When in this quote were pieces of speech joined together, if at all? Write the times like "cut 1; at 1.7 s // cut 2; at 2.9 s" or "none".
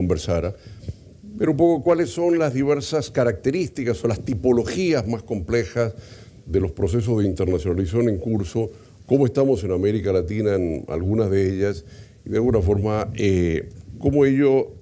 cut 1; at 7.4 s